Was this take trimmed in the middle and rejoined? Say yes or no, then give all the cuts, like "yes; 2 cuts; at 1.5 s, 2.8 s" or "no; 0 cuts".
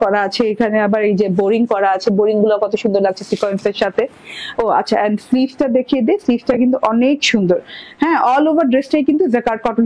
yes; 2 cuts; at 1.2 s, 5.2 s